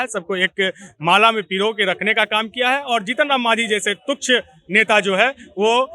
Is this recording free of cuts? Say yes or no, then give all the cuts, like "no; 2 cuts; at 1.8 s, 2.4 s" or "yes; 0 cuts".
yes; 0 cuts